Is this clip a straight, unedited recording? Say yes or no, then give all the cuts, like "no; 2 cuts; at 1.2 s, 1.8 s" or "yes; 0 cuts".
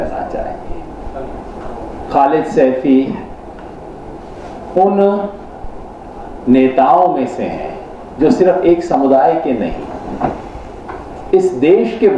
yes; 0 cuts